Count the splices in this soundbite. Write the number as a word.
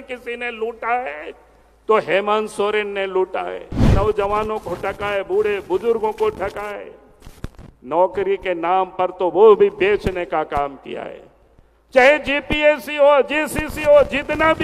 one